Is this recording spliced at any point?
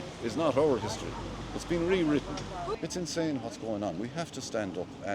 yes; 1 cut; at 2.7 s

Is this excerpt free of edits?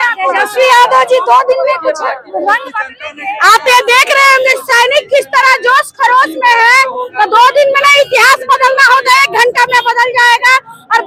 yes; 0 cuts

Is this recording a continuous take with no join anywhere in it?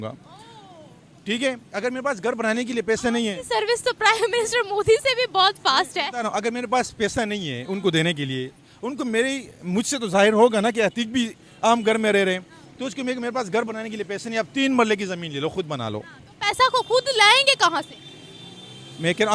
yes; 0 cuts

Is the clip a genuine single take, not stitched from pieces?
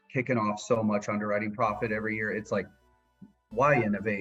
yes; 0 cuts

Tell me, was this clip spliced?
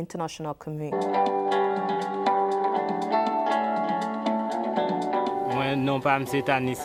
no; 0 cuts

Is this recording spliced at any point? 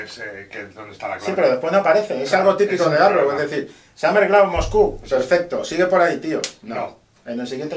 no; 0 cuts

